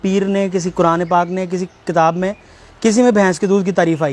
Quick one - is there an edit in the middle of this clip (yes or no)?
no